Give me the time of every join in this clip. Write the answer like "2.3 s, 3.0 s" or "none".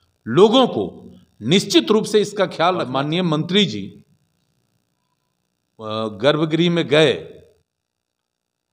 2.8 s

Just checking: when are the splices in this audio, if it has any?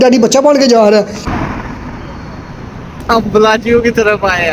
1.2 s, 3.0 s

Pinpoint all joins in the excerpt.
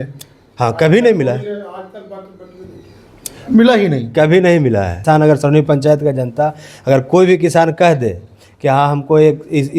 5.0 s

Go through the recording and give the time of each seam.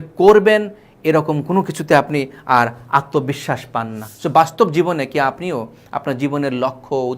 4.0 s

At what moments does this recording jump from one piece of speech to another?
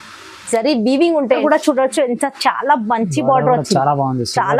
1.4 s

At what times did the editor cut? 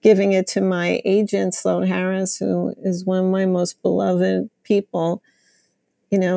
none

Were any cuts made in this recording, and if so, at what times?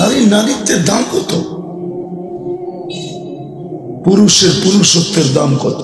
1.5 s, 4.0 s

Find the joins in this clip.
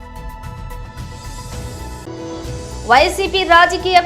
0.8 s, 2.7 s

